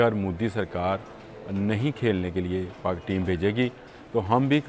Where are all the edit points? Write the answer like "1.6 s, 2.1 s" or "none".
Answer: none